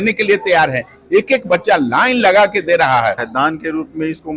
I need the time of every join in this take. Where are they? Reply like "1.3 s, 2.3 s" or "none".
3.3 s

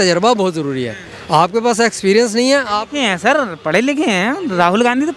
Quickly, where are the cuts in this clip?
none

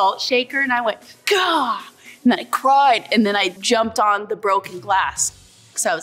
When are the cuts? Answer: none

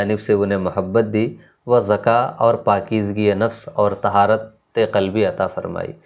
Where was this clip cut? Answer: none

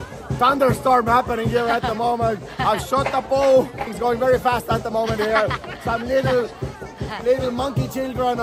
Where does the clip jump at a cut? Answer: 3.9 s

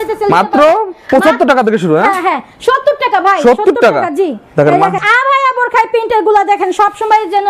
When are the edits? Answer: 5.0 s

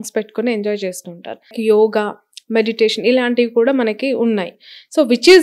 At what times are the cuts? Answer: 1.6 s

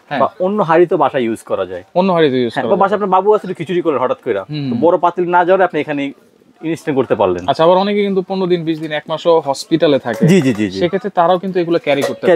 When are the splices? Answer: none

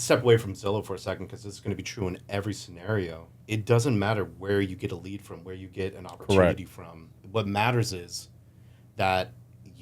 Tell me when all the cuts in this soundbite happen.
3.3 s

